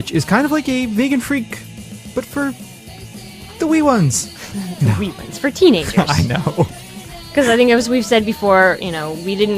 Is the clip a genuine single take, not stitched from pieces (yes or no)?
no